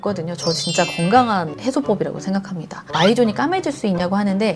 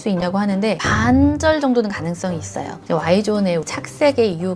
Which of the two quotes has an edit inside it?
first; 1 cut; at 2.8 s

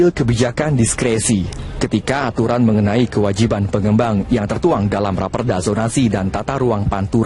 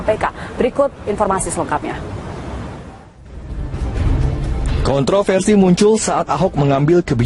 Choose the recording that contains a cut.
second; 1 cut; at 2.5 s

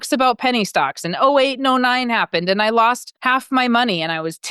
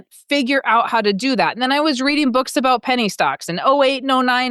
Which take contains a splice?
first; 1 cut; at 3.1 s

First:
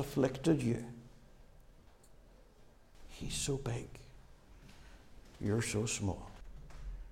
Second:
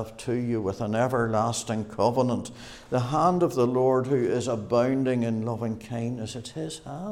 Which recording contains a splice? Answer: first; 3 cuts; at 1.9 s, 3.0 s, 6.4 s

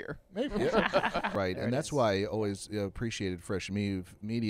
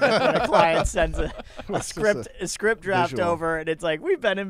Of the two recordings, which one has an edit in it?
first; 1 cut; at 1.3 s

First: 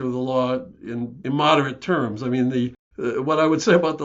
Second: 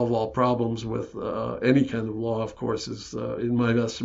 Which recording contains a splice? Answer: first; 2 cuts; at 1.2 s, 2.8 s

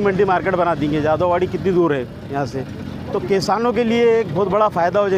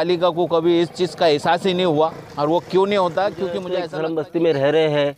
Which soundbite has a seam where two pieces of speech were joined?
second; 1 cut; at 3.8 s

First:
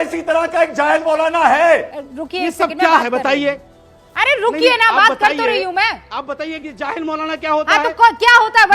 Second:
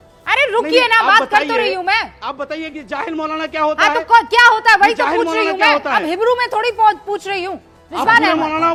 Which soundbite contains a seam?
first; 1 cut; at 2.0 s

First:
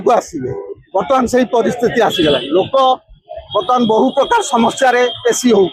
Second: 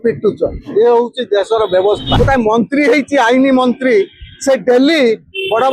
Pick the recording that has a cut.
second; 1 cut; at 2.1 s

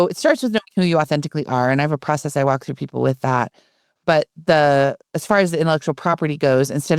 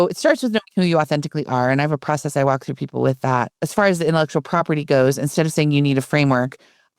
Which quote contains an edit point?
second; 1 cut; at 3.6 s

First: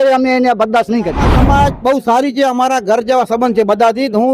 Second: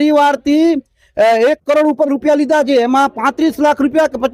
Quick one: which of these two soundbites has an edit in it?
first; 1 cut; at 1.3 s

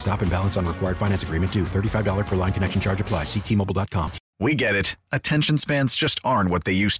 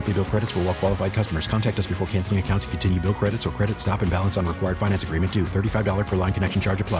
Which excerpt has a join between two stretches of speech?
first; 1 cut; at 4.2 s

